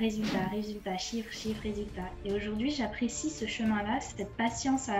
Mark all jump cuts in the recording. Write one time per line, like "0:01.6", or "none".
none